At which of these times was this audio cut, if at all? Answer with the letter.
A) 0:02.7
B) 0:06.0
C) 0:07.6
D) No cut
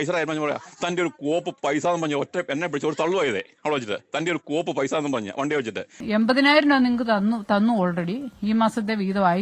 B